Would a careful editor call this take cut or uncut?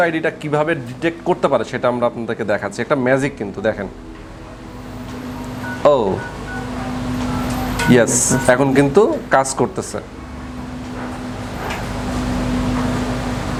uncut